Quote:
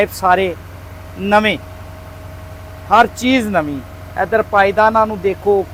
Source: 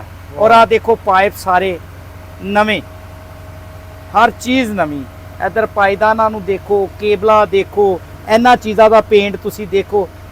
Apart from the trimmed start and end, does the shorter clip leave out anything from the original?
no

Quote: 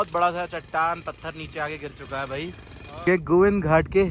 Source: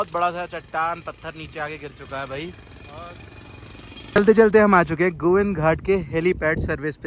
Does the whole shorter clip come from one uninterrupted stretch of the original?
no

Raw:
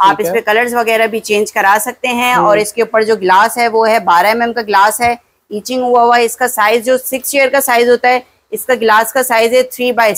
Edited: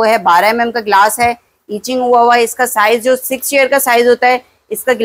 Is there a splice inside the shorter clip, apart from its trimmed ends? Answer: no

